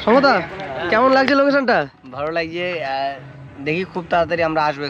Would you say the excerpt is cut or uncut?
uncut